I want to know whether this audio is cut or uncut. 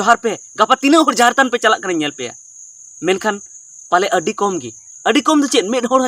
uncut